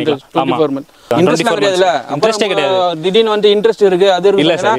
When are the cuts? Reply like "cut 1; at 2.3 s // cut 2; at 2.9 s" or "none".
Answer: cut 1; at 1.1 s